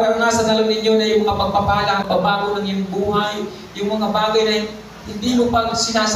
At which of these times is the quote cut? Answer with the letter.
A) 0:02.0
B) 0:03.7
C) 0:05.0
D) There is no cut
A